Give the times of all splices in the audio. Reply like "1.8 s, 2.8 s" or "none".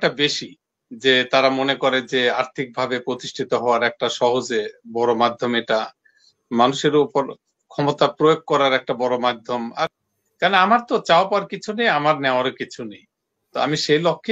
10.0 s